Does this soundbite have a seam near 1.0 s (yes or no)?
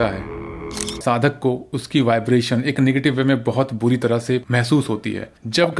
yes